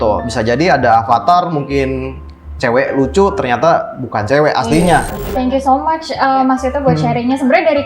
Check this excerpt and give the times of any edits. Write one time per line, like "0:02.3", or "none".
0:05.1